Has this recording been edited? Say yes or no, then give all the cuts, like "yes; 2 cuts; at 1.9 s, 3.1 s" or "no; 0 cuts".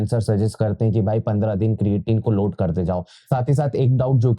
yes; 1 cut; at 3.1 s